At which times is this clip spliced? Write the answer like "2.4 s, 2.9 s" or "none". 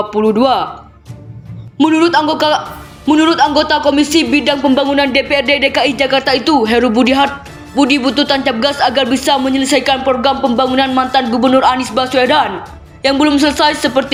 none